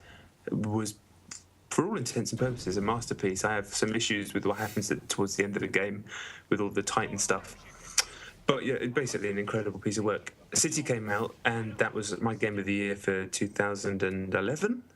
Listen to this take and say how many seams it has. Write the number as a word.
one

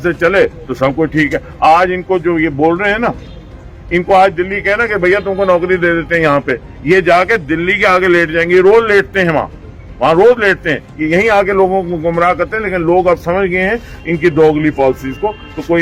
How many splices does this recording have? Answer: zero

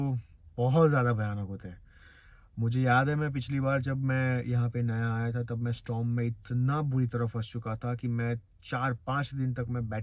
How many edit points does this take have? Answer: zero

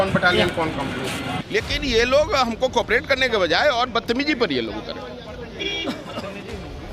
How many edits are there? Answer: one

